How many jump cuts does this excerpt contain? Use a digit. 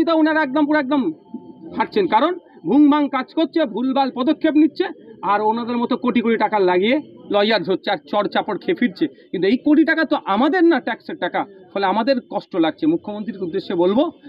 0